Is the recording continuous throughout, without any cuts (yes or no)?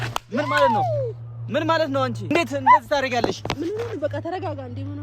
no